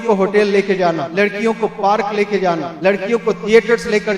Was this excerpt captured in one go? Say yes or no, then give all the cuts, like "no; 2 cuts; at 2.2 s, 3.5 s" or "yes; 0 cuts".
no; 2 cuts; at 1.1 s, 2.7 s